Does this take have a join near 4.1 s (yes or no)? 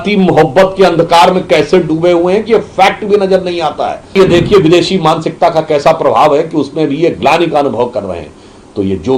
yes